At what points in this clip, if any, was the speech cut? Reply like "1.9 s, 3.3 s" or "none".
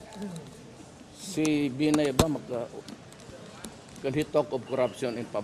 none